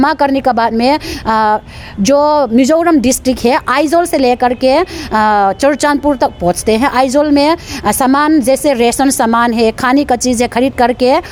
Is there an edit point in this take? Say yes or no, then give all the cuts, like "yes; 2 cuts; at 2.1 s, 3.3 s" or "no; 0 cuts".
no; 0 cuts